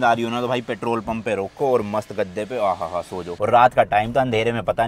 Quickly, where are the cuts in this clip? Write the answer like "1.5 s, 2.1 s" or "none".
3.3 s